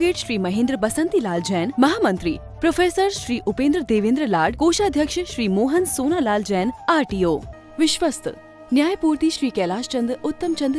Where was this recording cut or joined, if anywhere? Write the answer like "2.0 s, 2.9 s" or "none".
7.5 s